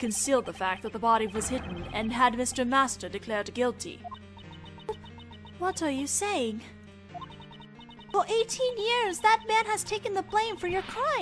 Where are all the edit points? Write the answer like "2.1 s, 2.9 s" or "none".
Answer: none